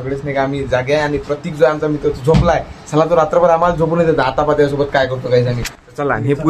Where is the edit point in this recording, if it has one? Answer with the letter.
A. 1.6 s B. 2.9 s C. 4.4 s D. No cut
D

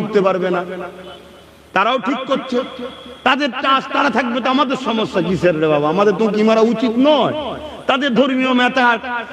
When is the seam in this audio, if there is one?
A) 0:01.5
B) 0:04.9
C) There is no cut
C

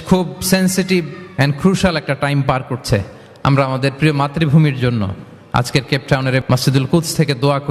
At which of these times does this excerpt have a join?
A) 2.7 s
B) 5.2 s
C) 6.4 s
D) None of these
C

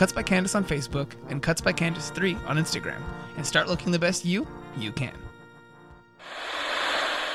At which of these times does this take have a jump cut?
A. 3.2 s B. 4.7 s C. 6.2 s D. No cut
C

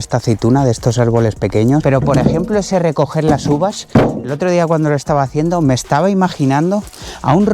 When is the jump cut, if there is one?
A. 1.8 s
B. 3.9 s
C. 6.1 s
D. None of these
A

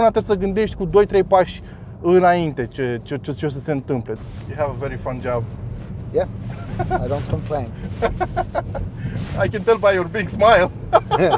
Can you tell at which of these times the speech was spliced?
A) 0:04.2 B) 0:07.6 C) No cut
A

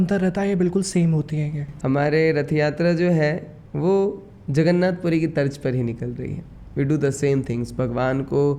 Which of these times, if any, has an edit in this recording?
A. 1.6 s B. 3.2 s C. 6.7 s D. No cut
A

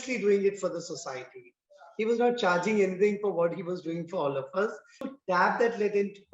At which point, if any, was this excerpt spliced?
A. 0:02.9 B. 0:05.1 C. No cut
B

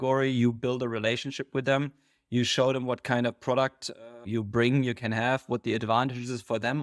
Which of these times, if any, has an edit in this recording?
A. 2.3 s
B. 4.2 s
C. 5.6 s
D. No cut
B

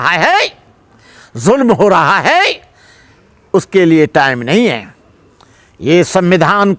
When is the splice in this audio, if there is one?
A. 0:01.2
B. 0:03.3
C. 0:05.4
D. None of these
D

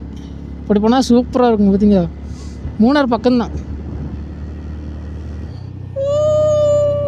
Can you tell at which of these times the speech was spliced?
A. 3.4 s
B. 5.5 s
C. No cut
B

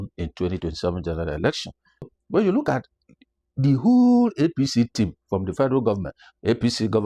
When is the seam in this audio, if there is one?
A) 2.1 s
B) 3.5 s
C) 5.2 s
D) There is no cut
A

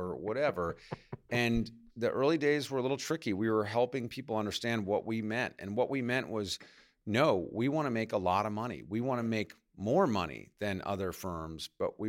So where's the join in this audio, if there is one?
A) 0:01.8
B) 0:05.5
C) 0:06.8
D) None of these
A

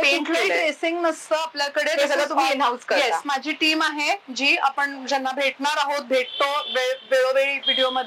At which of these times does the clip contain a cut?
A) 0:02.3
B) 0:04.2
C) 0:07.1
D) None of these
D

